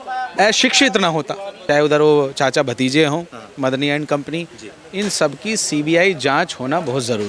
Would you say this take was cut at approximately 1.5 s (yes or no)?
yes